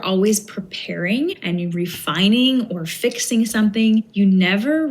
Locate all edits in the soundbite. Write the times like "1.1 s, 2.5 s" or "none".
1.4 s, 4.1 s